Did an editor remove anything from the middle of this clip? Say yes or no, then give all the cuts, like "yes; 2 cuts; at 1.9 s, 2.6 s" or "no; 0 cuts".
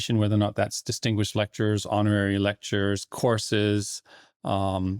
no; 0 cuts